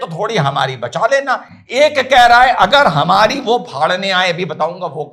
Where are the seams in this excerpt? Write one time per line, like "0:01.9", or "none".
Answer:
none

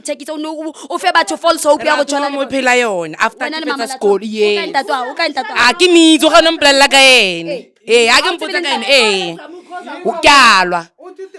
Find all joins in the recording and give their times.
none

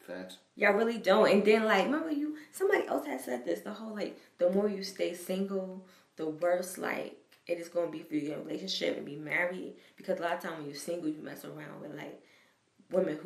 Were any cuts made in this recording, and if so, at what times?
none

